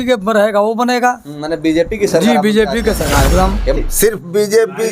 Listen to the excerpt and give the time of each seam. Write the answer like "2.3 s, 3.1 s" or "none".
3.8 s